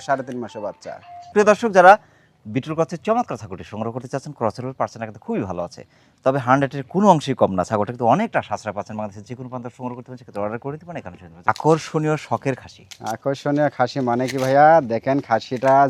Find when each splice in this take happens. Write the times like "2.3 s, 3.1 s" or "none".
none